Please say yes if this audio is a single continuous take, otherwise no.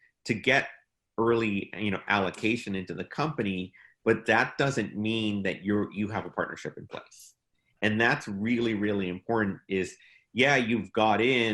yes